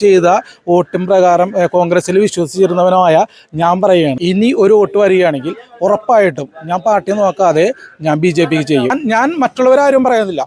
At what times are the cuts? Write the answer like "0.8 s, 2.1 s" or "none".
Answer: 4.2 s, 8.9 s